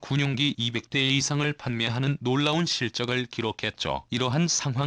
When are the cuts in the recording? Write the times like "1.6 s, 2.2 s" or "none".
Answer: 1.0 s